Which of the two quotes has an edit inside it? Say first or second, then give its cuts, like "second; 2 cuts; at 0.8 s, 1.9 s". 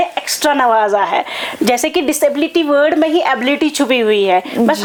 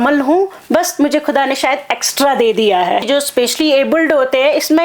second; 1 cut; at 3.0 s